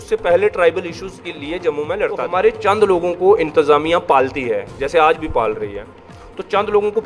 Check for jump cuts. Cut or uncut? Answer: cut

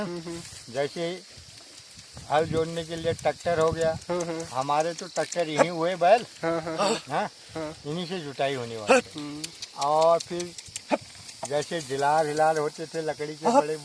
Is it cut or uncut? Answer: uncut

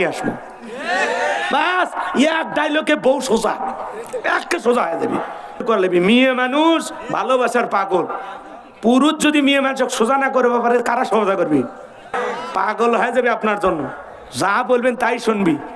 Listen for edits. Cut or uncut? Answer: cut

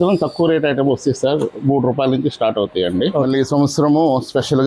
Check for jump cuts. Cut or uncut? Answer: cut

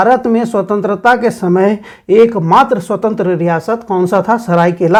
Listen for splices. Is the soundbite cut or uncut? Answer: uncut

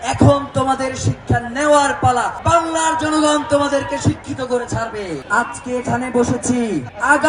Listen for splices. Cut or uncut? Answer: cut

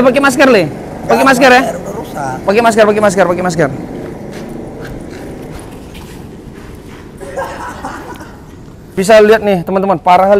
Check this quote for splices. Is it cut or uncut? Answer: cut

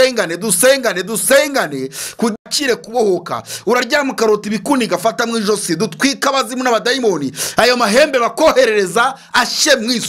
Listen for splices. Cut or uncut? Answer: cut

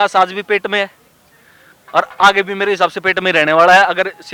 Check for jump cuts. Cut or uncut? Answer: uncut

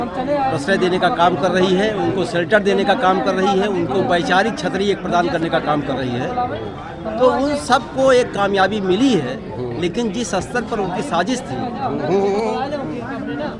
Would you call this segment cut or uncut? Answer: uncut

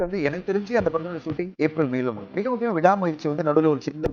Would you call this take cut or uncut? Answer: cut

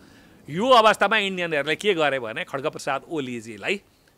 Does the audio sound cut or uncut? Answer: uncut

